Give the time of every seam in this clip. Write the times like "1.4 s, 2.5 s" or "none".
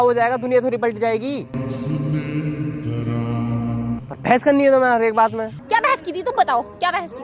4.0 s, 5.6 s